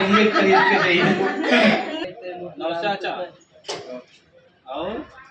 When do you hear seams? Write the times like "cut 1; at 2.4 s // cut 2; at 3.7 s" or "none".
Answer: cut 1; at 2.0 s